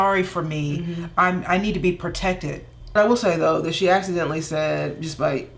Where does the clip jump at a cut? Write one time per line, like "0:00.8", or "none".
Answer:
0:02.7